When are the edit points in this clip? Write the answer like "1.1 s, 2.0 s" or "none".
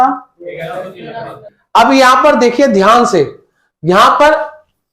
1.4 s